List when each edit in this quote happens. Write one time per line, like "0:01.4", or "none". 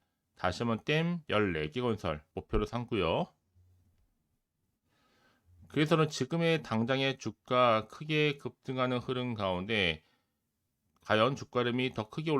0:02.3